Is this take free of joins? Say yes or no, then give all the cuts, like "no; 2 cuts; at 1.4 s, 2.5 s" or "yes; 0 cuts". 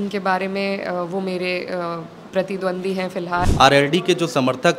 no; 1 cut; at 3.5 s